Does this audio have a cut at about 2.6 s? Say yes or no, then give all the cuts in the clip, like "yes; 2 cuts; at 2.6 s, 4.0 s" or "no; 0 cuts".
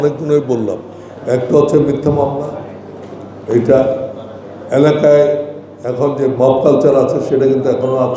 no; 0 cuts